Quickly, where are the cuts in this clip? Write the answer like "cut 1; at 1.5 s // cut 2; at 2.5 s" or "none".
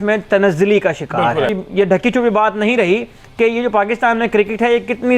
cut 1; at 1.6 s